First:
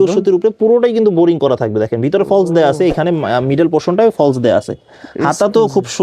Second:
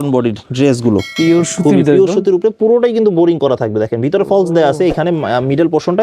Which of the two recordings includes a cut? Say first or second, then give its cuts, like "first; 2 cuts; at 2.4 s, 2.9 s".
second; 1 cut; at 1.1 s